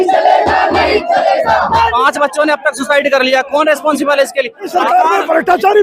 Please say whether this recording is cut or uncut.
cut